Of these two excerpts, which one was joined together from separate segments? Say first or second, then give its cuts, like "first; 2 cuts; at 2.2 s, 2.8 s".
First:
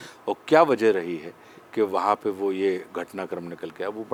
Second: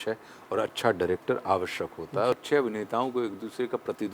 second; 1 cut; at 2.4 s